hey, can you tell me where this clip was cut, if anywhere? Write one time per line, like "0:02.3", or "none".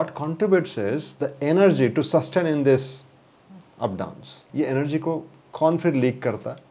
0:04.4